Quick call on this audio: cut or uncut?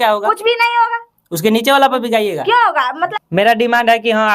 cut